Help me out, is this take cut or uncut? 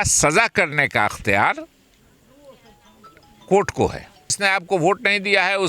cut